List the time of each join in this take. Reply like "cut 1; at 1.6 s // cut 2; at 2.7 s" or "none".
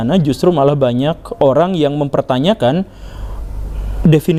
none